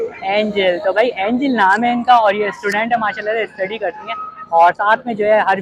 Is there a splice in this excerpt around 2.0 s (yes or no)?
no